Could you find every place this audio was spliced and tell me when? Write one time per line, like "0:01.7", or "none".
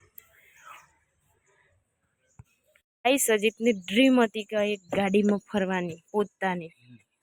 none